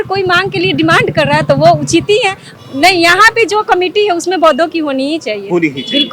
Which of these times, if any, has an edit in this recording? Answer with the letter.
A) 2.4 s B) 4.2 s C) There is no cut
A